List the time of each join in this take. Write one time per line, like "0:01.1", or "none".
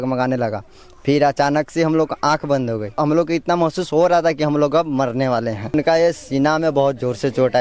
0:03.0
0:05.7